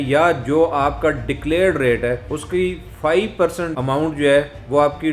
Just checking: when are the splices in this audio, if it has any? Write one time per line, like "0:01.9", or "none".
0:02.3
0:03.7